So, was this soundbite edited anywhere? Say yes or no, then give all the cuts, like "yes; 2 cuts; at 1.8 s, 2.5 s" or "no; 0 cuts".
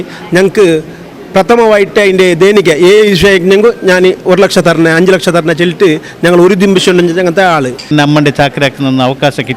yes; 1 cut; at 7.9 s